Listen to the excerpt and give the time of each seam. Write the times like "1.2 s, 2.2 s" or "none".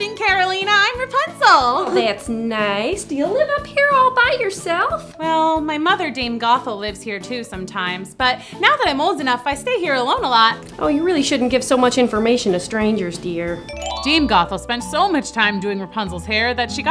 13.7 s